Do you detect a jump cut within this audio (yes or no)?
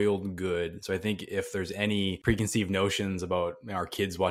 yes